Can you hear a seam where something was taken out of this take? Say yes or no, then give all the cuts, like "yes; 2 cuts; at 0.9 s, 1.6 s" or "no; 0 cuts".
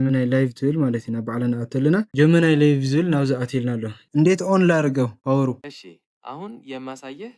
yes; 1 cut; at 3.9 s